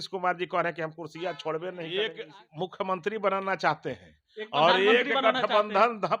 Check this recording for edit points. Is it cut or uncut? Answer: cut